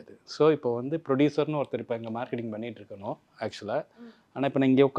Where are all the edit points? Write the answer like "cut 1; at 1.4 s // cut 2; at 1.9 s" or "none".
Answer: none